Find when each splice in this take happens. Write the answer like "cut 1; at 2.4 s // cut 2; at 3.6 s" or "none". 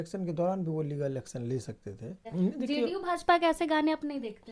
cut 1; at 2.2 s